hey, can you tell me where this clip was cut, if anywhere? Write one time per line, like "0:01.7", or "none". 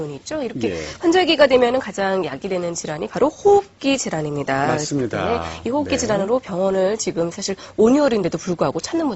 0:03.0